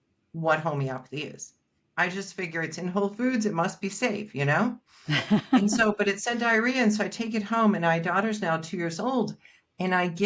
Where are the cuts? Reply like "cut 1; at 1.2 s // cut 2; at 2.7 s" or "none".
none